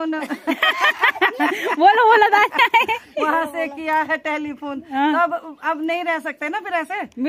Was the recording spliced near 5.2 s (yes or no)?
no